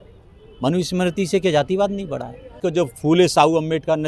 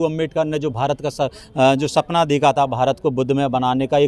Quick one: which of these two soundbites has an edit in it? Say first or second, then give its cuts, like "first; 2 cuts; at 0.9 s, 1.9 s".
first; 1 cut; at 2.6 s